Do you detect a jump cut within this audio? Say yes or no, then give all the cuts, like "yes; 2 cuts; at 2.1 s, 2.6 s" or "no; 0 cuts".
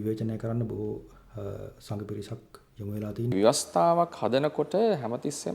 yes; 1 cut; at 3.3 s